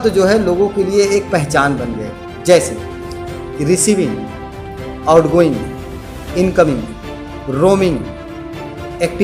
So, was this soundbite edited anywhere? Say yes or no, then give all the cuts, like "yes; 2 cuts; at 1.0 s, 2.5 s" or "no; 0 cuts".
no; 0 cuts